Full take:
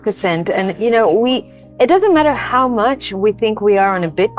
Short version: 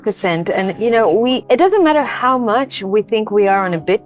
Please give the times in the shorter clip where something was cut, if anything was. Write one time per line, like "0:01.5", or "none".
0:01.4